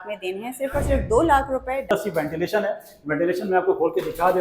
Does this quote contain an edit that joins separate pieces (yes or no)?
yes